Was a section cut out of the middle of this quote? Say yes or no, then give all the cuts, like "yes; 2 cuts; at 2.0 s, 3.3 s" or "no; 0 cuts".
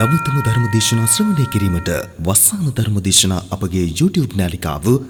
no; 0 cuts